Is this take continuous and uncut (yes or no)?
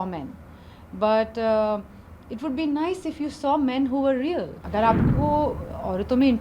no